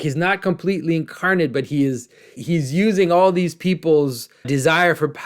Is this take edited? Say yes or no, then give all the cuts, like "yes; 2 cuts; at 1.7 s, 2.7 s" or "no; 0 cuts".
yes; 2 cuts; at 2.4 s, 4.5 s